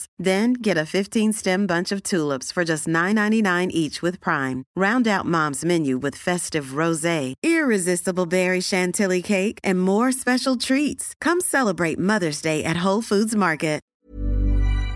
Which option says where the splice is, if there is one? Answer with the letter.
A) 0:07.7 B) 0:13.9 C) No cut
B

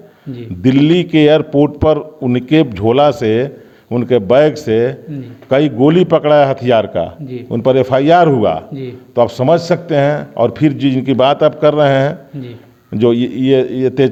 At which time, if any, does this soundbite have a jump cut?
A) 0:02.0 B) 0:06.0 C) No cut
C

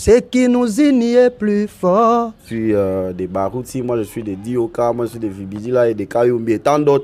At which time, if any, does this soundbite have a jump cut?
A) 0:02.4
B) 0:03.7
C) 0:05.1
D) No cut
A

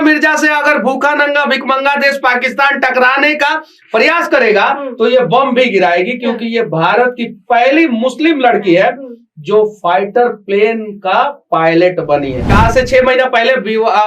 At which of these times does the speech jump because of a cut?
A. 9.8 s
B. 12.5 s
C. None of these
B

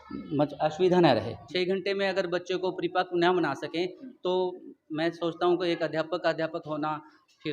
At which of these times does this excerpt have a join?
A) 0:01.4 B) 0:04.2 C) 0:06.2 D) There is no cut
A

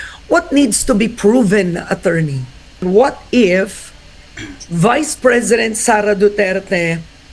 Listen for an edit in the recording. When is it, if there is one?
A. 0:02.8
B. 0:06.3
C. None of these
A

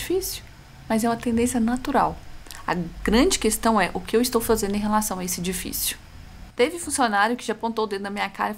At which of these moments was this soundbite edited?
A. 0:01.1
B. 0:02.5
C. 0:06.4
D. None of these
C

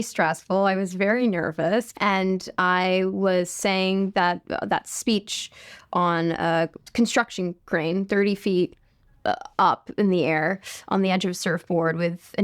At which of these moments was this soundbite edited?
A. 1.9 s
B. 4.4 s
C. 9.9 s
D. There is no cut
A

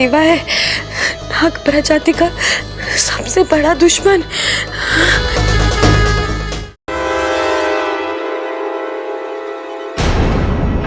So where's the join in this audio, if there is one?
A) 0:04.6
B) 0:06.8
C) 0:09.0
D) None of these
B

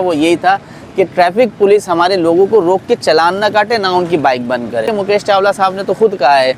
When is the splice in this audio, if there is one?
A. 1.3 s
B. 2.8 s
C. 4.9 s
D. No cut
C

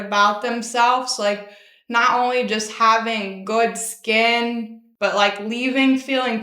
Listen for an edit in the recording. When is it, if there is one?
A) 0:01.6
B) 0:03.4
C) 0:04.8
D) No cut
C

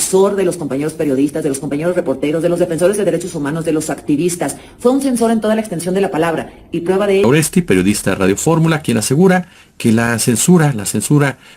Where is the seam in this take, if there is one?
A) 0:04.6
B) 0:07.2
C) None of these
B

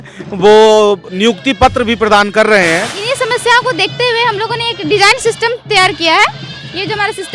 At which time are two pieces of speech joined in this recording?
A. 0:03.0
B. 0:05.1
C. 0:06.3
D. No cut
A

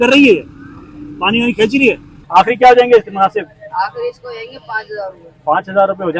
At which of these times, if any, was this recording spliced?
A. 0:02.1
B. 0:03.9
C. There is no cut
A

